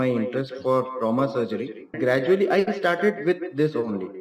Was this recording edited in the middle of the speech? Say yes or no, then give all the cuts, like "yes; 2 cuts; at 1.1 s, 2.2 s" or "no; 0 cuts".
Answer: yes; 1 cut; at 1.9 s